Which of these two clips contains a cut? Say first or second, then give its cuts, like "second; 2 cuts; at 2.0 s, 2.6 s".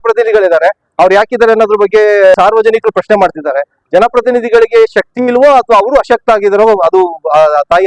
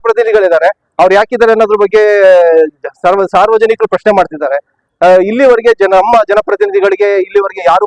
first; 2 cuts; at 2.3 s, 3.7 s